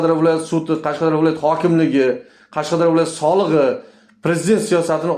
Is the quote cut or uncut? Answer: uncut